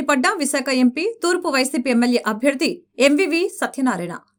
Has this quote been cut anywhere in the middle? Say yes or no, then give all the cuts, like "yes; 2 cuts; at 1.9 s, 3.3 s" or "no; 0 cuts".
no; 0 cuts